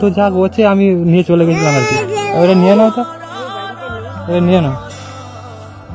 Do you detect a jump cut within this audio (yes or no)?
yes